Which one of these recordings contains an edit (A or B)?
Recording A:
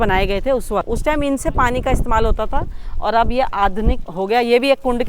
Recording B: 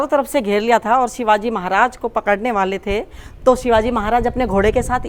A